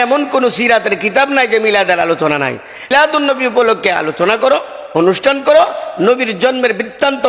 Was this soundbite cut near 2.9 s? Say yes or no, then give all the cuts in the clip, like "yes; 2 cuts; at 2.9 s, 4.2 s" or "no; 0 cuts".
yes; 1 cut; at 2.9 s